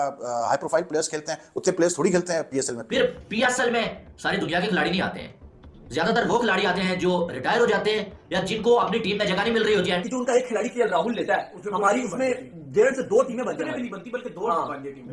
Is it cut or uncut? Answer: cut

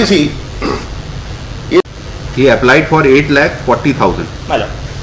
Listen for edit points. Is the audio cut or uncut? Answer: cut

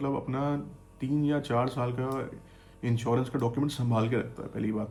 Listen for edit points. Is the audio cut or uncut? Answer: uncut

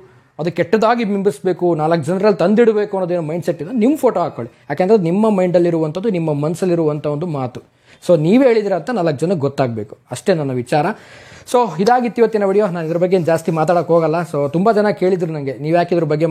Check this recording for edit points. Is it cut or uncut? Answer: uncut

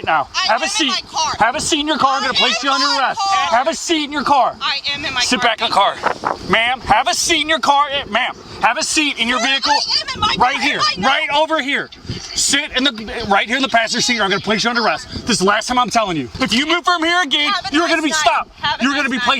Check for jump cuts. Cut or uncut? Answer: cut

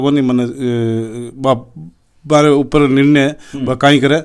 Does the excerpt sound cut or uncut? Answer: uncut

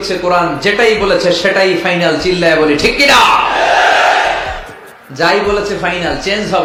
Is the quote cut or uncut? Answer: uncut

